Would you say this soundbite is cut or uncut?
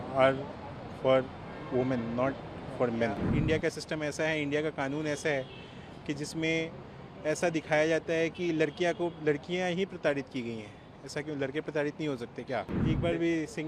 cut